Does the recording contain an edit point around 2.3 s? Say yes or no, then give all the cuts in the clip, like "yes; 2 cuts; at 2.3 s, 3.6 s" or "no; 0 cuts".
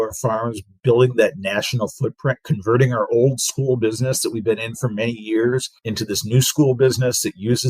no; 1 cut; at 5.8 s